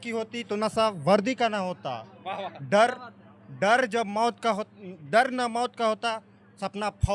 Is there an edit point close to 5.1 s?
no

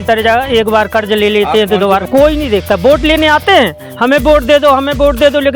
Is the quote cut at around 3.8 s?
no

